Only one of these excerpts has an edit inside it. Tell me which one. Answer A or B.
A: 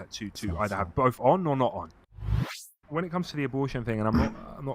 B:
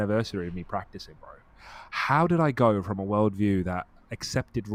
A